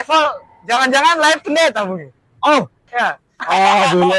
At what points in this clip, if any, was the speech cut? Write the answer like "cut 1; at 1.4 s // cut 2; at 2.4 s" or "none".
none

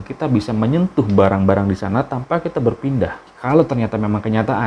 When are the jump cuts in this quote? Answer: cut 1; at 3.3 s

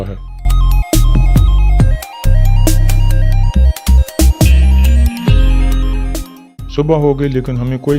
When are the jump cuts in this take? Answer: cut 1; at 2.0 s

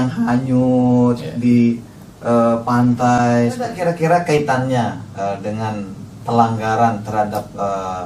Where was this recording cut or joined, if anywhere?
cut 1; at 3.8 s

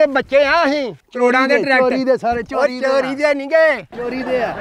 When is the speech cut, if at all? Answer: cut 1; at 1.0 s

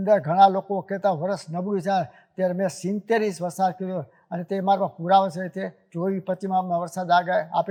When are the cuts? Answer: none

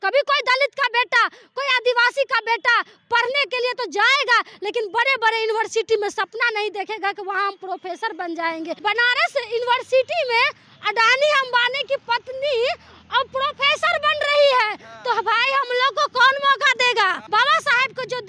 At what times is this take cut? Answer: cut 1; at 8.7 s // cut 2; at 17.2 s

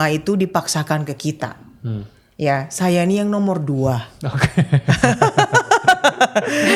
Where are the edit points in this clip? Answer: none

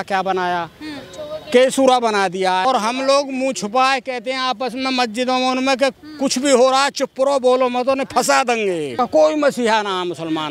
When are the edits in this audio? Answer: cut 1; at 2.7 s // cut 2; at 8.9 s

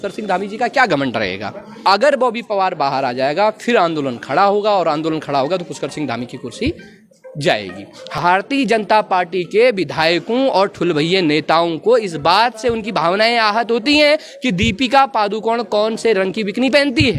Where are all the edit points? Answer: cut 1; at 1.7 s // cut 2; at 8.2 s

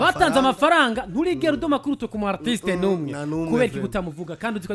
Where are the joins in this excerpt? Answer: none

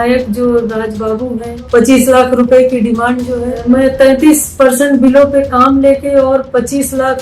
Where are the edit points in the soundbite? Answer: cut 1; at 1.5 s // cut 2; at 3.6 s

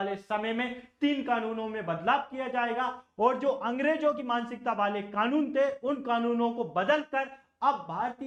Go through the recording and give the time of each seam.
none

